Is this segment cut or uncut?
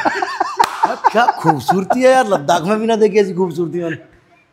uncut